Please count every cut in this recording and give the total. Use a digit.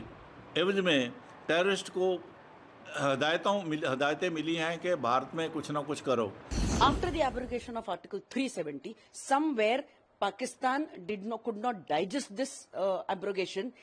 1